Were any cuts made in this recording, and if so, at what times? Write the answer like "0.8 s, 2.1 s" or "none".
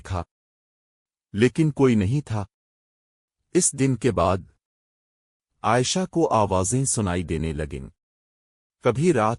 none